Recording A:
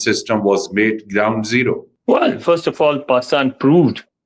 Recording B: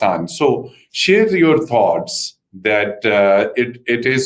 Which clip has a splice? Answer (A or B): A